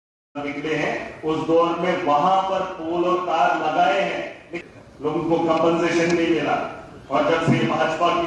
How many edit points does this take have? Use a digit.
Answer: 1